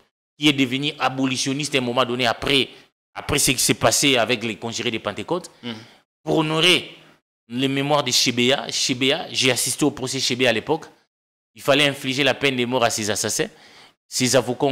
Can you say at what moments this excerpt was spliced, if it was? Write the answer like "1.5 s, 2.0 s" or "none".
none